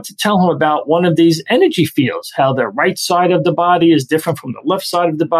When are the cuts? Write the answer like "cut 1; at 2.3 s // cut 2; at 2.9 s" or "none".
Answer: none